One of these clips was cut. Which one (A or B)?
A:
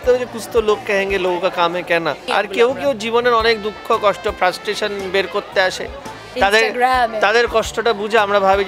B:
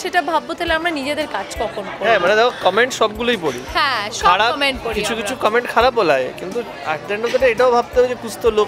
A